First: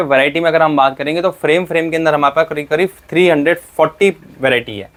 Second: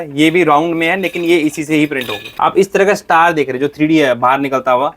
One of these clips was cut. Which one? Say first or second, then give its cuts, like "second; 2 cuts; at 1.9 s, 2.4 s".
second; 1 cut; at 2.2 s